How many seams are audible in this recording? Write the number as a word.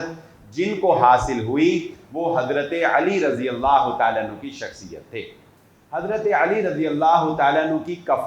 zero